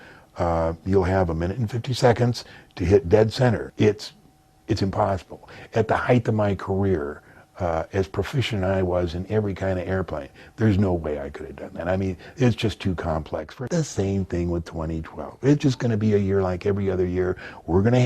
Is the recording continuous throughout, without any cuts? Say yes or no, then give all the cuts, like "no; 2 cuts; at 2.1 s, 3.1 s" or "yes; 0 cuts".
no; 2 cuts; at 3.7 s, 13.5 s